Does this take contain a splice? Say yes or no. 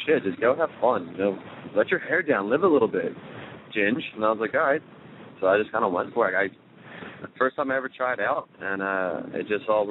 no